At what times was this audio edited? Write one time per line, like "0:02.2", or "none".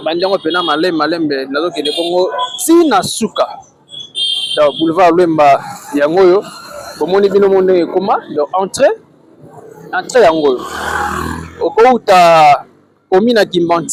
none